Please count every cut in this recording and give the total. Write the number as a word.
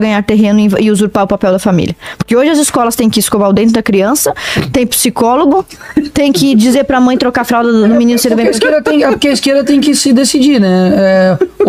zero